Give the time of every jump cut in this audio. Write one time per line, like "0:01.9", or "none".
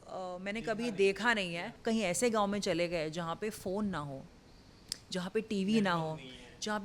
0:01.7